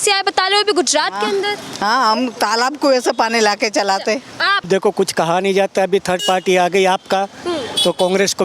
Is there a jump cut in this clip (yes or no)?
yes